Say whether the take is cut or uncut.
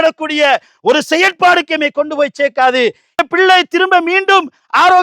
cut